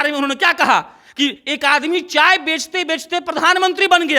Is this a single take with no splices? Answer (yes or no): yes